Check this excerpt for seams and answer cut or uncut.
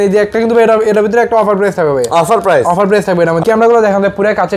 cut